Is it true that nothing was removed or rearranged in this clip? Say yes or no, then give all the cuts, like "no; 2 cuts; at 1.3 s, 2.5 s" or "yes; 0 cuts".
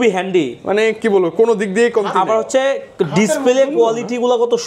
yes; 0 cuts